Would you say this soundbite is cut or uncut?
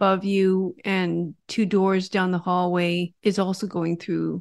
cut